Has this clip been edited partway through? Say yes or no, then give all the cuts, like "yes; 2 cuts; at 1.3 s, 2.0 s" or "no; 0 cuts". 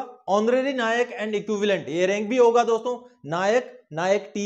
no; 0 cuts